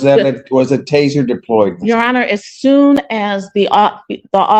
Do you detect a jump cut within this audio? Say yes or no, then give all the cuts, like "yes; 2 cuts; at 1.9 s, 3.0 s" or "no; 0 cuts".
no; 0 cuts